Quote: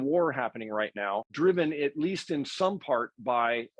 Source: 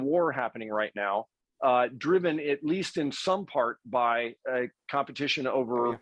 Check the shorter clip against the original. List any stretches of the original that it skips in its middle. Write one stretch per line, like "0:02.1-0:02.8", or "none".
0:01.3-0:02.0